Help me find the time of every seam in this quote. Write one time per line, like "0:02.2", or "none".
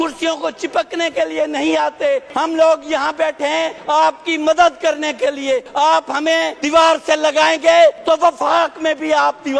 0:02.3
0:03.8
0:05.7
0:06.6
0:08.0